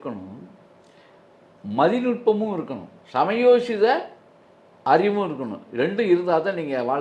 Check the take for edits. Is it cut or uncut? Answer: uncut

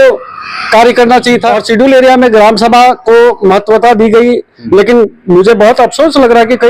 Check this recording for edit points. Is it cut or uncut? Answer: cut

